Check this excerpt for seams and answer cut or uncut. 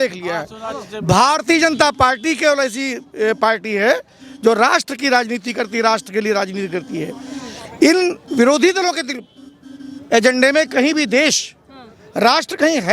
uncut